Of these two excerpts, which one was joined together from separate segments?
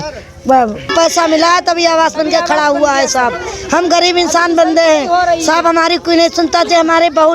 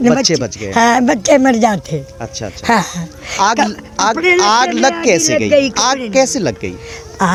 first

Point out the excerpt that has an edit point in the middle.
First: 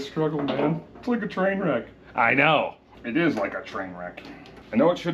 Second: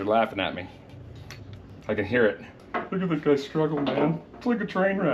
first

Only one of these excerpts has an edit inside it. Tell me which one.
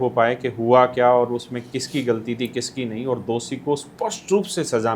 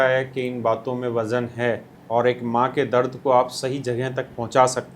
second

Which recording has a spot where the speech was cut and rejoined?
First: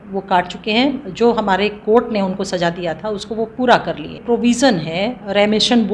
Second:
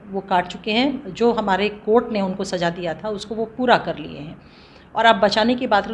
first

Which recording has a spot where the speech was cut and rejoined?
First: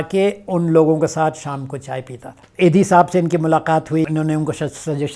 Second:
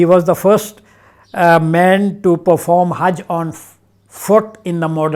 first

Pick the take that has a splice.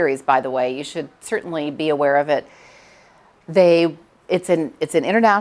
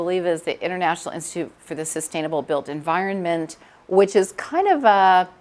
first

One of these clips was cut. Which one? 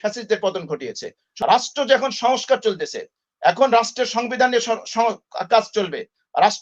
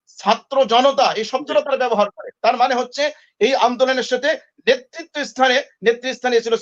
first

